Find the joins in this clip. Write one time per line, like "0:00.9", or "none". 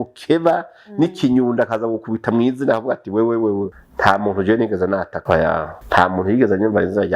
0:03.7
0:05.6